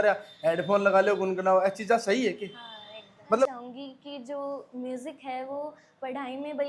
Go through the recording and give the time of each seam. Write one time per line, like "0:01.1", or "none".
0:03.5